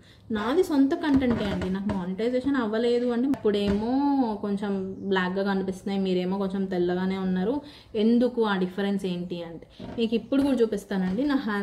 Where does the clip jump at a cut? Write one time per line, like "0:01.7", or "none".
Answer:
0:03.4